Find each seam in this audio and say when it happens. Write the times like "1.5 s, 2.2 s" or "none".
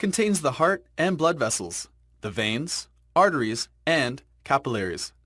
1.9 s